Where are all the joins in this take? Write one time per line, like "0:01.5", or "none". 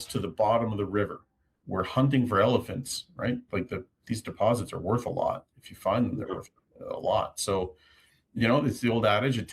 0:01.6